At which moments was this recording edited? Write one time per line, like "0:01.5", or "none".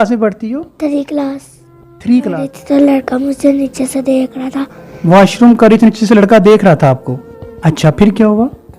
0:02.5